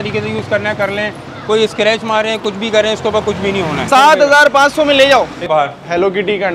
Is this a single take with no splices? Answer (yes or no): no